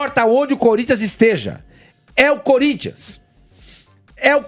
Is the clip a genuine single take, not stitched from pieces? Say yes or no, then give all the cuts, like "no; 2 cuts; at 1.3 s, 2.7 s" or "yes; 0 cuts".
yes; 0 cuts